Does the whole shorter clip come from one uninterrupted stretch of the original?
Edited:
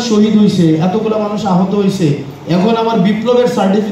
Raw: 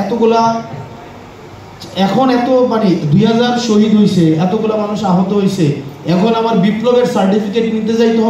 yes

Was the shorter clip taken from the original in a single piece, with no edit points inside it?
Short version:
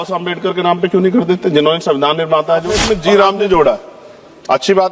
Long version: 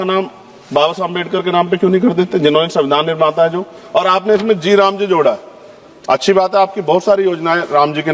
no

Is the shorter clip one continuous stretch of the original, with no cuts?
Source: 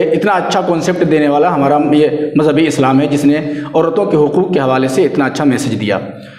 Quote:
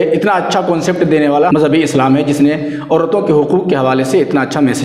no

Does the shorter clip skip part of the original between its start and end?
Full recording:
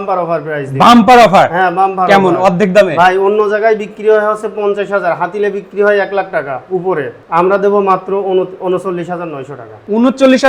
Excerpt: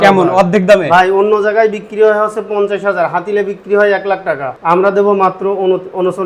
yes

